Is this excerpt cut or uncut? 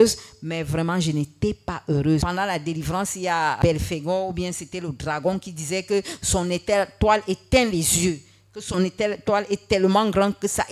cut